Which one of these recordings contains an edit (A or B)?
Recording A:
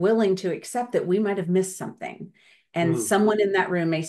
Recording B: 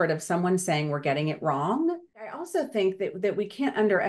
B